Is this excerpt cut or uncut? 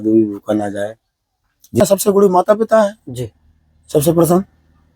cut